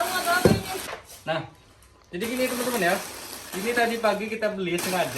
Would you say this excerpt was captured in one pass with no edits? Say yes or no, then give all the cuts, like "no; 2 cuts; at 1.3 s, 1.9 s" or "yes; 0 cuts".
no; 1 cut; at 0.9 s